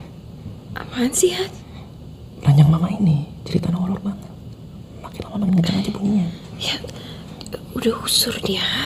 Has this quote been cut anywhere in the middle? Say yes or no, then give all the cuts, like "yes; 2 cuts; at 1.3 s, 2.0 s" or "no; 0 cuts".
no; 0 cuts